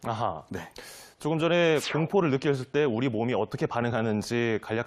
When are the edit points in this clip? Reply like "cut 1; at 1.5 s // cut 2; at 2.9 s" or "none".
cut 1; at 2.7 s